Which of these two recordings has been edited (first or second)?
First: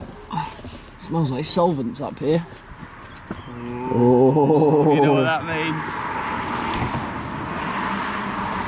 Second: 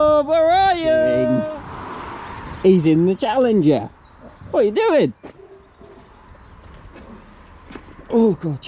second